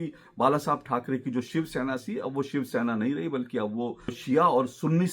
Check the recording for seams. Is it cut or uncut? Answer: cut